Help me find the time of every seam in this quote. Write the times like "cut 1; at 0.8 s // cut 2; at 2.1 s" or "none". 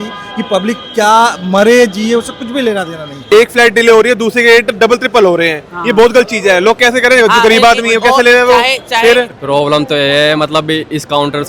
cut 1; at 3.2 s // cut 2; at 9.3 s